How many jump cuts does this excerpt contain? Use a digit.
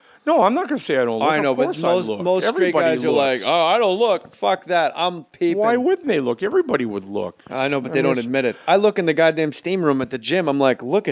0